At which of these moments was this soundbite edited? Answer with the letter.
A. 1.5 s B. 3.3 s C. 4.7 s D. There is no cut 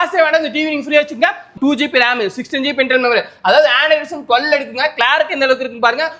A